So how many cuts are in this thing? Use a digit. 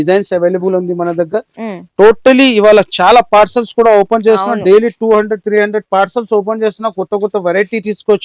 0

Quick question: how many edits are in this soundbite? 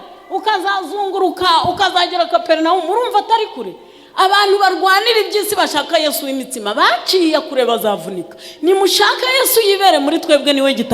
0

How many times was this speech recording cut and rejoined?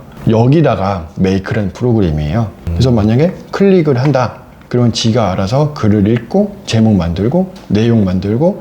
1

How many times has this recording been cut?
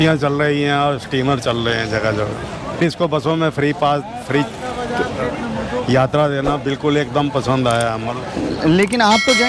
1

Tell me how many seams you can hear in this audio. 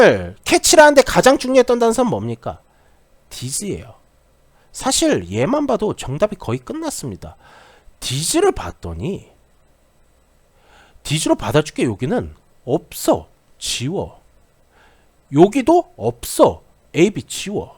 1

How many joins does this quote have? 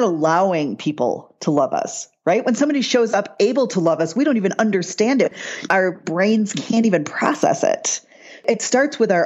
2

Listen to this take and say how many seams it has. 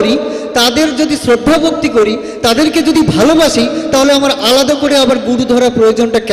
0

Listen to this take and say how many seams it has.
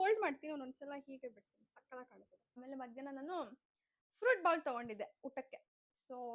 1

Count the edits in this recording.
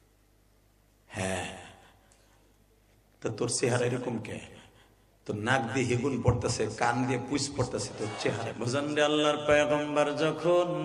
1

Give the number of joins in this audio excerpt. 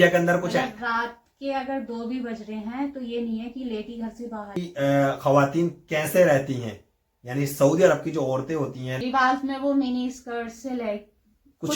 2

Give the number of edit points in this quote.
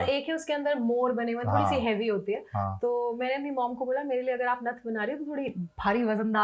0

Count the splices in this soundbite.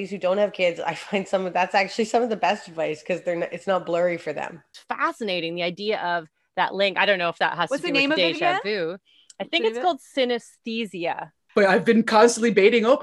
2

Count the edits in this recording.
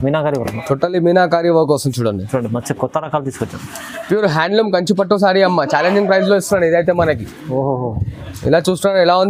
0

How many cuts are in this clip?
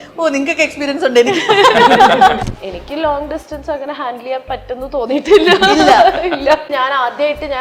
2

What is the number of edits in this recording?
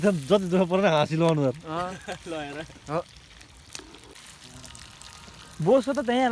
1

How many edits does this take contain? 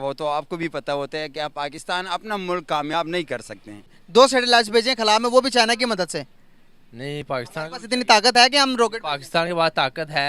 1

